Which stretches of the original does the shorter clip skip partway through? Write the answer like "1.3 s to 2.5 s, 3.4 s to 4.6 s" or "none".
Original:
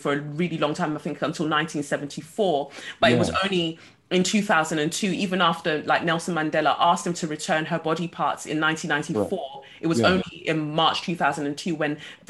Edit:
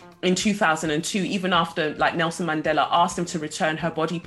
none